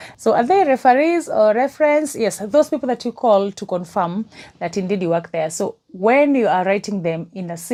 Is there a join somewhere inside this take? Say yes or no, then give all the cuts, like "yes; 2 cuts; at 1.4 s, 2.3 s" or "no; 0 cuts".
no; 0 cuts